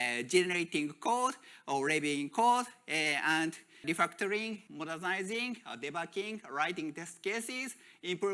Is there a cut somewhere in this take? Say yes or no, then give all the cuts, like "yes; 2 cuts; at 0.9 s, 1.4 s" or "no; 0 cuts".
yes; 2 cuts; at 3.8 s, 4.7 s